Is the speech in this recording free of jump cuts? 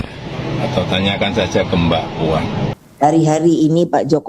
no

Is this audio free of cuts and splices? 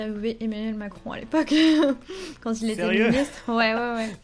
yes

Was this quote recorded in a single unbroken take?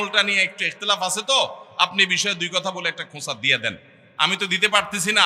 yes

